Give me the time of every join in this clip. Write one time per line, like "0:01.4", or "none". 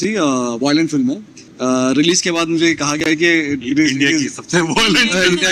none